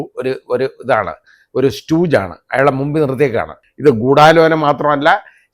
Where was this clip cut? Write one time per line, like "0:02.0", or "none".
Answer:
0:03.6